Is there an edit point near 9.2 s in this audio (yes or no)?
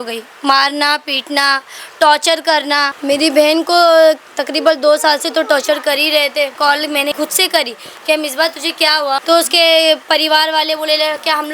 yes